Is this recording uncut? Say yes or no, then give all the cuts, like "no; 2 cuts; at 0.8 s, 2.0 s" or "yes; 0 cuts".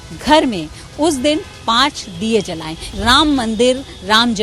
no; 1 cut; at 2.9 s